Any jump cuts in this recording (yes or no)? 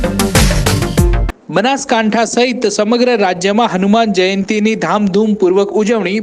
yes